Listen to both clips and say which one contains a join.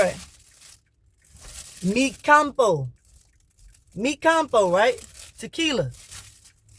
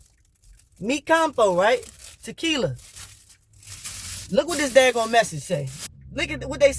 second; 1 cut; at 5.9 s

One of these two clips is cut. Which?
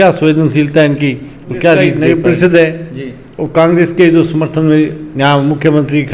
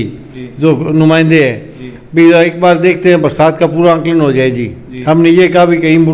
first; 1 cut; at 2.0 s

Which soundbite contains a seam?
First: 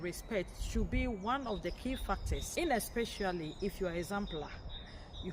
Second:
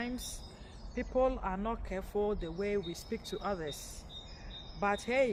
first; 1 cut; at 2.4 s

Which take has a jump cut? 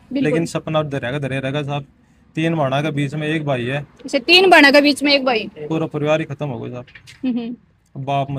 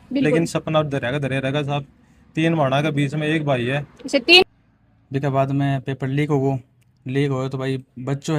second; 1 cut; at 4.4 s

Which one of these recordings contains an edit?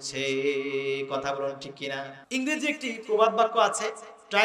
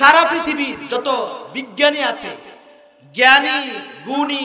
first; 1 cut; at 2.2 s

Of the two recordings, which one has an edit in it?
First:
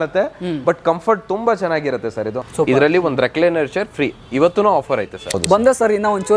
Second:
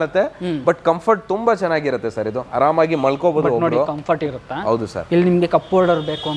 first; 2 cuts; at 2.4 s, 5.3 s

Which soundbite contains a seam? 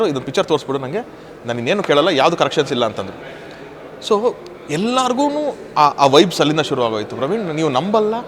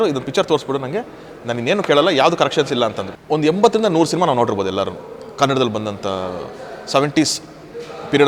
second; 1 cut; at 3.1 s

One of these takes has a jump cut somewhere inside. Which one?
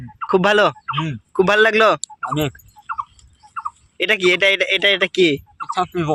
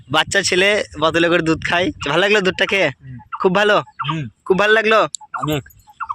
second; 1 cut; at 2.0 s

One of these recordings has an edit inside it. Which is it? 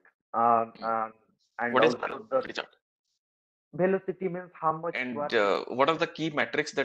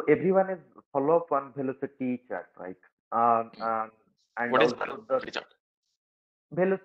first; 1 cut; at 5.0 s

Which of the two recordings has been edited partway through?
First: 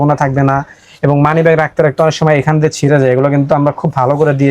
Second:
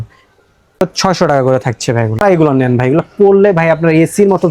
second; 2 cuts; at 0.8 s, 2.2 s

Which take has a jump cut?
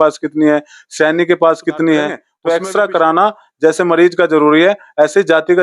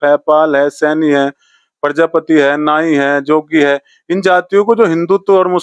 first; 1 cut; at 2.3 s

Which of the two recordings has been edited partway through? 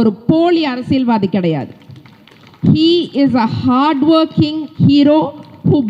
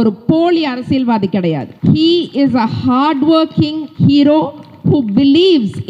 second; 1 cut; at 1.7 s

